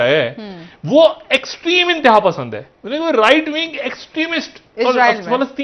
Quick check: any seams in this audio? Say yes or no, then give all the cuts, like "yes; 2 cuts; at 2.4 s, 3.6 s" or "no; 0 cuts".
no; 0 cuts